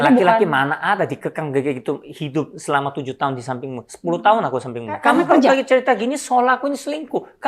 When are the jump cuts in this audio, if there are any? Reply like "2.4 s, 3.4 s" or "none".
5.0 s